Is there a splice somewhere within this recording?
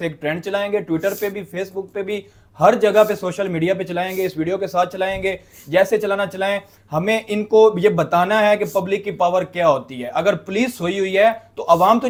no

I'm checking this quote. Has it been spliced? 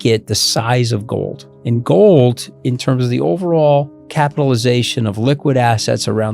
yes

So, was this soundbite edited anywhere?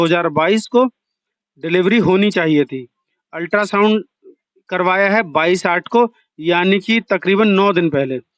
no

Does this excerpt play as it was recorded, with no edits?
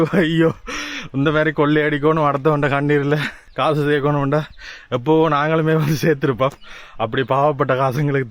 no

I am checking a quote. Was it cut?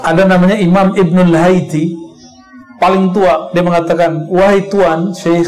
no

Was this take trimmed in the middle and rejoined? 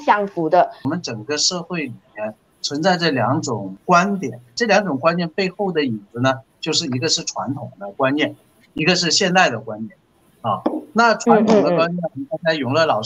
yes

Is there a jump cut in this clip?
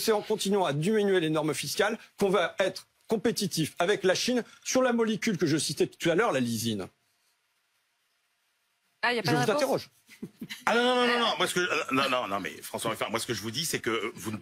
no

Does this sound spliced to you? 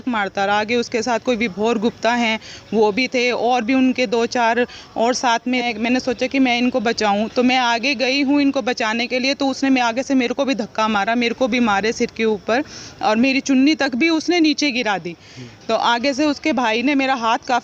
yes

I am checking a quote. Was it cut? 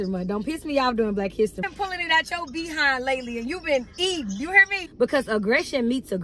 yes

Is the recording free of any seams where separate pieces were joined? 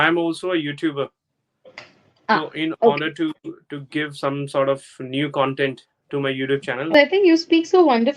no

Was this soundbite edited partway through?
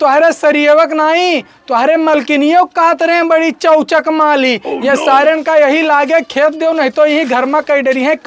no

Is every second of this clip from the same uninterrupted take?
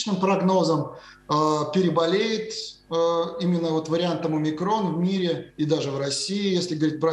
yes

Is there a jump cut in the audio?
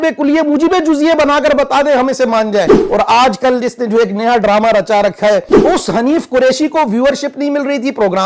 yes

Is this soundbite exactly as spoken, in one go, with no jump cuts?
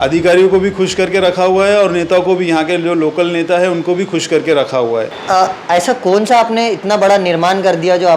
no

